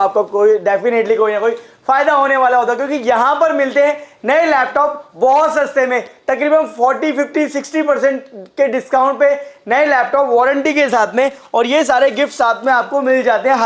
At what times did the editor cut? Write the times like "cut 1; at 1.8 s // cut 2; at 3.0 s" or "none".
none